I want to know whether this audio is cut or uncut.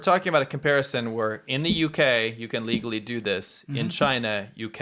uncut